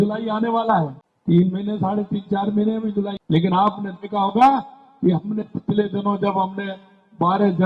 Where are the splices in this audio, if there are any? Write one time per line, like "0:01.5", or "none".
0:01.0
0:03.2